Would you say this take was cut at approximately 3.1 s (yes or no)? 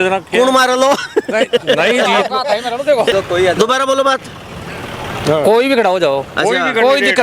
yes